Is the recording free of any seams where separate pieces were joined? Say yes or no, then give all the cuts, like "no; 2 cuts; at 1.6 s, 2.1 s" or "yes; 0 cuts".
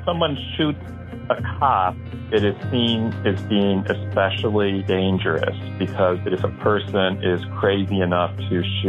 no; 2 cuts; at 4.8 s, 6.2 s